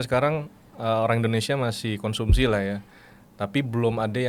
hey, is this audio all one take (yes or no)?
yes